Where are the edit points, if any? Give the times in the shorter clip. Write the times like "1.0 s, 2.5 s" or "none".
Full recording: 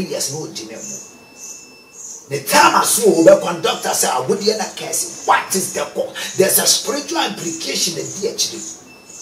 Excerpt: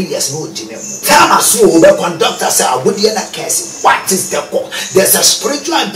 1.0 s